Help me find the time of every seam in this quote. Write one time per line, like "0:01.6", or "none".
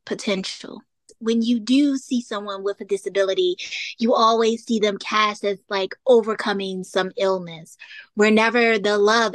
0:01.1